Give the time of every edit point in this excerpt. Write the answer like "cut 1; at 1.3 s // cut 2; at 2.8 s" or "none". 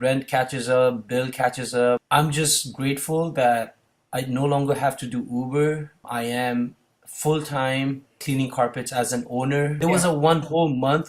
cut 1; at 2.0 s // cut 2; at 6.1 s // cut 3; at 8.2 s // cut 4; at 9.8 s